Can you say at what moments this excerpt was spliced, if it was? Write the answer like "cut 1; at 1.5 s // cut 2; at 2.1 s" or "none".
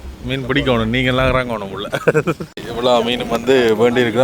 cut 1; at 2.5 s